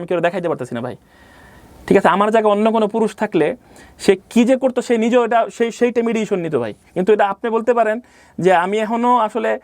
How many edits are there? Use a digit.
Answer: 0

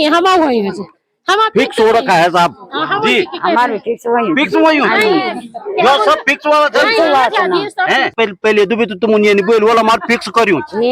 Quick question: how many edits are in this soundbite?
1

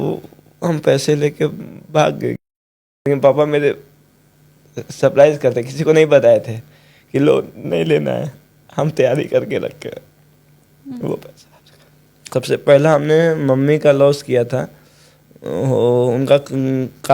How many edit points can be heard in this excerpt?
2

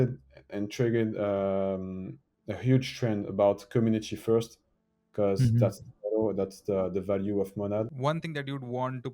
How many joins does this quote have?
1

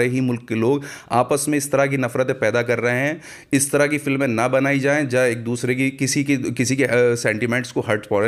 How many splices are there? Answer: 0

